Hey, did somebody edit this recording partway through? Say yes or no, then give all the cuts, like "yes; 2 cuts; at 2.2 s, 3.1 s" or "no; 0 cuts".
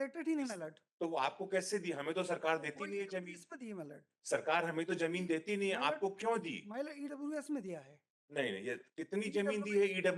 no; 0 cuts